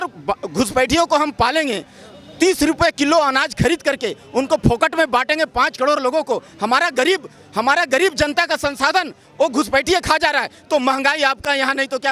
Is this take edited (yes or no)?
no